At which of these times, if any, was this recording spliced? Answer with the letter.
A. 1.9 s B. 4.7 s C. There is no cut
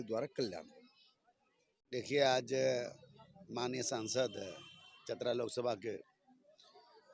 A